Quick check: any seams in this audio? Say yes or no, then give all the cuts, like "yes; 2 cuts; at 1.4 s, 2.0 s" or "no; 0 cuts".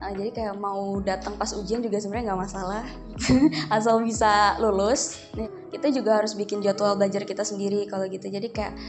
yes; 1 cut; at 5.4 s